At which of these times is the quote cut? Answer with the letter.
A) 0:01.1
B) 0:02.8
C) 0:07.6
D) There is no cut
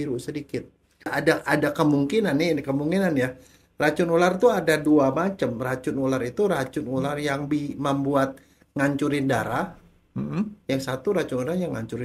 A